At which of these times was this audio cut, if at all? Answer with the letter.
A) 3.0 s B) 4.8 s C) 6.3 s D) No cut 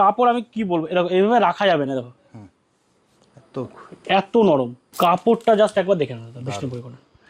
B